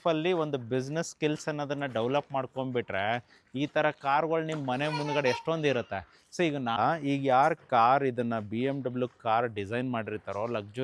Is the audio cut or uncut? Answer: cut